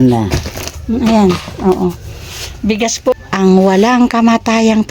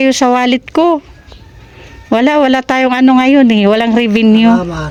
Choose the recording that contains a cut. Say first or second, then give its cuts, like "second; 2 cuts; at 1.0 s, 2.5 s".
first; 1 cut; at 3.2 s